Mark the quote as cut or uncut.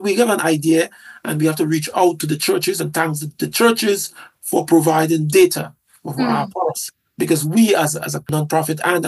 uncut